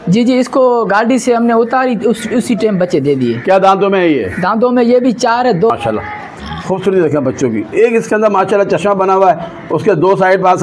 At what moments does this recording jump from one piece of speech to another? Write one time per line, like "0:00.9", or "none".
0:05.7